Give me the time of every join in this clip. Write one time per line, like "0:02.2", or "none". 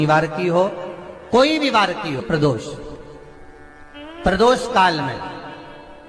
0:02.2